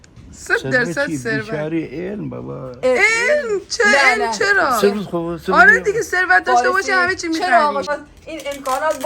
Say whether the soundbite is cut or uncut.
cut